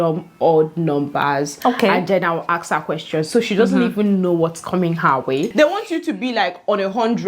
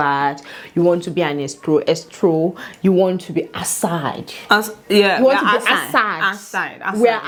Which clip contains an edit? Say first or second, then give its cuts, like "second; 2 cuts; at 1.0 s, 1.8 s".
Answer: first; 1 cut; at 5.5 s